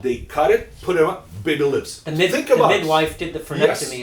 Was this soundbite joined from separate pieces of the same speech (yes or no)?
no